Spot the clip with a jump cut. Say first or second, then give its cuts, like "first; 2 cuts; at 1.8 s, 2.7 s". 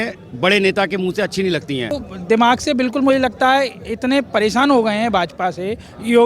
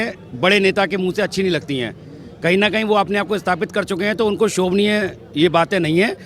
first; 1 cut; at 2.1 s